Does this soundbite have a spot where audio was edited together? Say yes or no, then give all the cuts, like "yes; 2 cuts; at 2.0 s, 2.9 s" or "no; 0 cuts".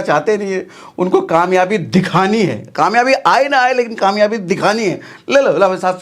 no; 0 cuts